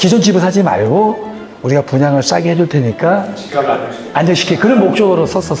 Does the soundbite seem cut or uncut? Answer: uncut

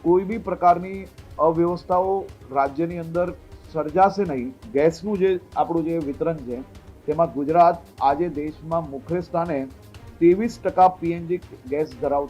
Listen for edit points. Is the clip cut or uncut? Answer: cut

